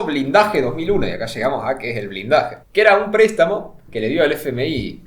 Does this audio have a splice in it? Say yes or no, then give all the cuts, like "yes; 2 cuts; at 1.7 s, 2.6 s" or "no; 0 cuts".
yes; 1 cut; at 2.6 s